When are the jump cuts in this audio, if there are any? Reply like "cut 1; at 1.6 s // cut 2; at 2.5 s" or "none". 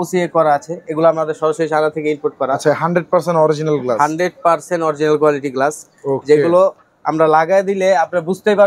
none